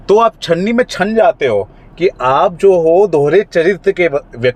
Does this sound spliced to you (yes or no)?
no